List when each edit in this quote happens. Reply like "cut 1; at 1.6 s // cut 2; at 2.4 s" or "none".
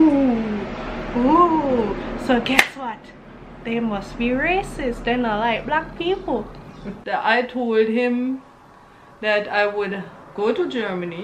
cut 1; at 7.0 s